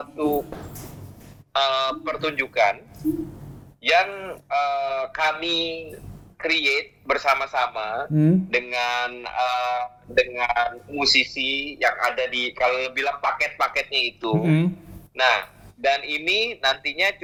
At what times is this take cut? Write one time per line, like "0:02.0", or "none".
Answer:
none

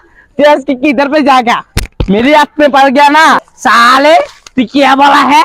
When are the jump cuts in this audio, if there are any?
0:03.4

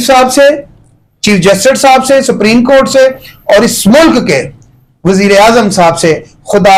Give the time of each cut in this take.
none

